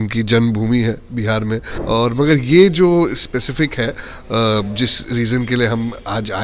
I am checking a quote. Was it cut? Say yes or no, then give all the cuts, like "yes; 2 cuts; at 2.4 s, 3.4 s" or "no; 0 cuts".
yes; 1 cut; at 1.7 s